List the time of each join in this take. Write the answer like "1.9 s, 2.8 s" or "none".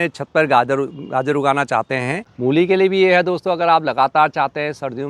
2.3 s